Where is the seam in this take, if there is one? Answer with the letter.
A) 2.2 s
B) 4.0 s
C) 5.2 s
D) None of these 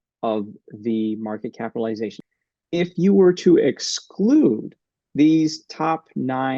A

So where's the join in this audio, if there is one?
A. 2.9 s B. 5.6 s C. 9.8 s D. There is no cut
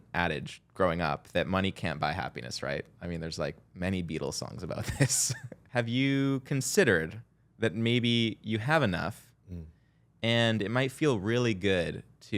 B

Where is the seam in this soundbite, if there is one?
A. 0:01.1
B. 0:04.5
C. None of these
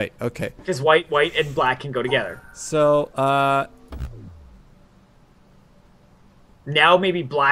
A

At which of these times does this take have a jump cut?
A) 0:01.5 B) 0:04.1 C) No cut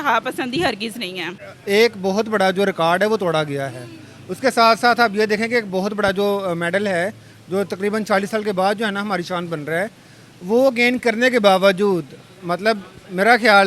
A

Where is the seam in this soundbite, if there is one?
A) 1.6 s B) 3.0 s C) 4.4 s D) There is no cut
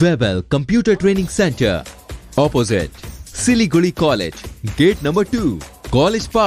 D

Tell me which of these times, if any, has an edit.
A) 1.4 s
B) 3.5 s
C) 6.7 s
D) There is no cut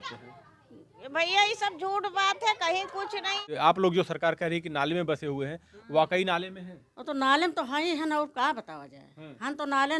B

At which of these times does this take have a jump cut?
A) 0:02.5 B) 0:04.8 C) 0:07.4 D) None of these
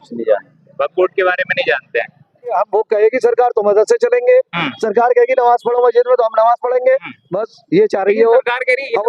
A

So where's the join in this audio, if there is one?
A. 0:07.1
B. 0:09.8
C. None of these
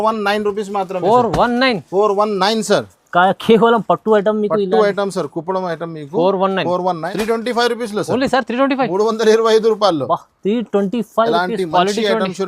A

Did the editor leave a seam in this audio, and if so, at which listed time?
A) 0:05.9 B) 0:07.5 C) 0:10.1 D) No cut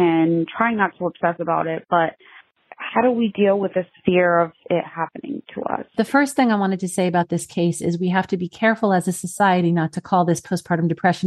A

